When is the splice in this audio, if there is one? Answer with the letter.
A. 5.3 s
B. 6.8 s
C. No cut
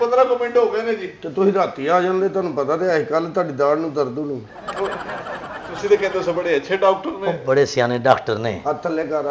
C